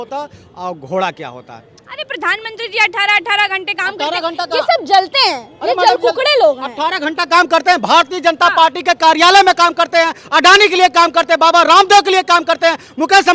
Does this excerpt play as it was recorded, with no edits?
yes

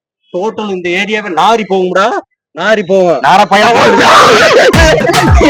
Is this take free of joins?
yes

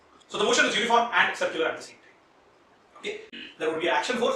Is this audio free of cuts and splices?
no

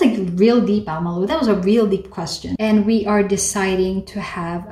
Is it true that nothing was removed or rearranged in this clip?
no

